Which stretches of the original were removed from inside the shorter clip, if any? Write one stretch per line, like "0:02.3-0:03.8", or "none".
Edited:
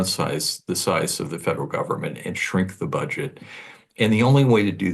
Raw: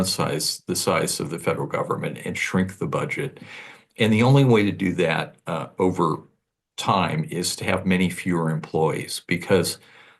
none